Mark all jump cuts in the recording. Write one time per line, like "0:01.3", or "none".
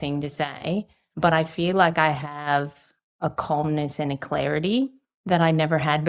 0:01.0
0:05.1